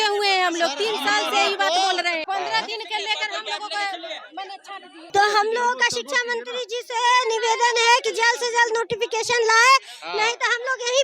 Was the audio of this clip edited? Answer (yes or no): no